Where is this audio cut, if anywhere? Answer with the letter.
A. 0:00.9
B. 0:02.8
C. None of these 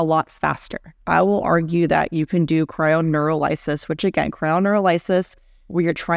A